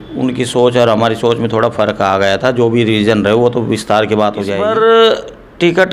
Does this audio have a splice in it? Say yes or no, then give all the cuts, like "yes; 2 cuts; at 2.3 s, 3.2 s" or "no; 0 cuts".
yes; 1 cut; at 4.5 s